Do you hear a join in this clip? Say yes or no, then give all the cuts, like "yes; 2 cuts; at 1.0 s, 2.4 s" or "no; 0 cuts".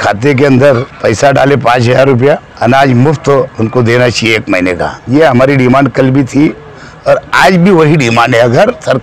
yes; 4 cuts; at 0.9 s, 2.5 s, 3.5 s, 5.0 s